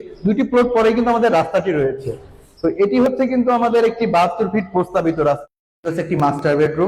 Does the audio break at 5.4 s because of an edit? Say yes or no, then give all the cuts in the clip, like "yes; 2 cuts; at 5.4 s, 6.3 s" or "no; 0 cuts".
yes; 1 cut; at 5.4 s